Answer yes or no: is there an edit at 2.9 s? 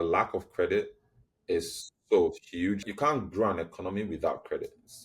yes